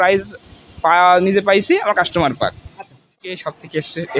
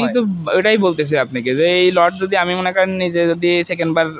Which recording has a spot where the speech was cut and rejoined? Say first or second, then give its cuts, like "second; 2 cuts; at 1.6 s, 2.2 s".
first; 1 cut; at 3.1 s